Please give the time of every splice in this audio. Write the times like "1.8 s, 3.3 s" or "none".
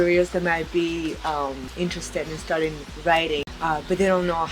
1.6 s, 3.5 s